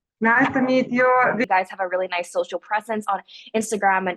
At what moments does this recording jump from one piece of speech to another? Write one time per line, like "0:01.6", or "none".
0:01.4